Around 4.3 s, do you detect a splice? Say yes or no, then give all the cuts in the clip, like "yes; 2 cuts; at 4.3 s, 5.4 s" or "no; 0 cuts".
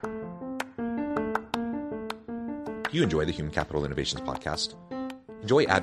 no; 1 cut; at 2.9 s